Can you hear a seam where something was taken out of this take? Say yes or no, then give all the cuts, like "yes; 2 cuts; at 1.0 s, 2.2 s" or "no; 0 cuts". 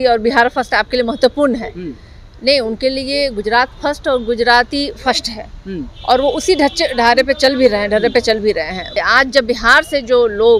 yes; 1 cut; at 9.0 s